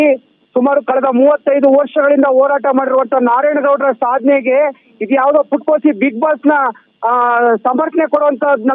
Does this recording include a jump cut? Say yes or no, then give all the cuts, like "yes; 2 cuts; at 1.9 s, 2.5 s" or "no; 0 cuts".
no; 0 cuts